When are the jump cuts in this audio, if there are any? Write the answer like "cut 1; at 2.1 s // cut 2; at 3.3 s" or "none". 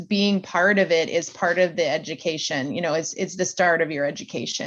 none